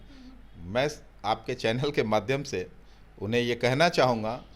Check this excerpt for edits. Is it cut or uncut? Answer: uncut